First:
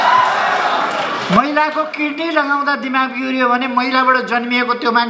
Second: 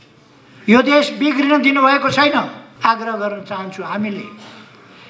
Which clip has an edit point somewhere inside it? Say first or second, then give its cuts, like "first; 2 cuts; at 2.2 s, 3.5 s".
second; 1 cut; at 2.6 s